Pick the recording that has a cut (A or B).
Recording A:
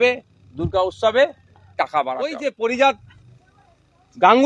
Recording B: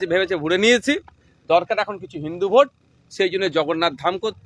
A